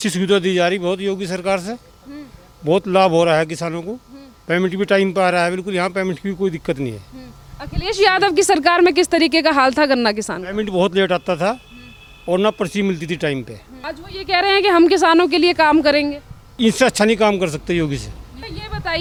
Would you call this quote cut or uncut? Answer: uncut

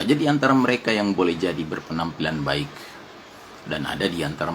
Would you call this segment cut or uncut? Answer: uncut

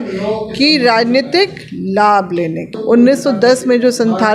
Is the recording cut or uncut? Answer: cut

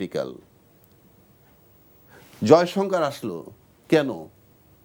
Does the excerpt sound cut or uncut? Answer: uncut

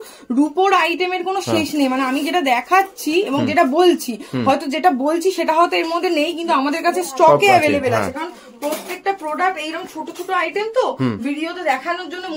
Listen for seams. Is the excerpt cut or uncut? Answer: uncut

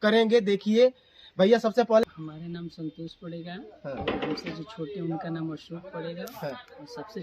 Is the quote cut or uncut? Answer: cut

